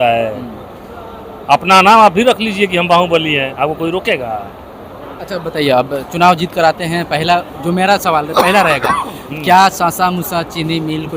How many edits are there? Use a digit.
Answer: 0